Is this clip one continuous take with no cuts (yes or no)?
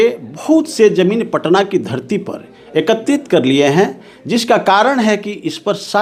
yes